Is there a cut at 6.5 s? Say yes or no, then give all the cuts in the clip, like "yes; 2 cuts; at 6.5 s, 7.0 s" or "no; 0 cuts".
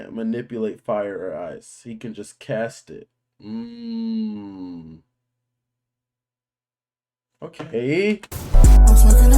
no; 1 cut; at 8.4 s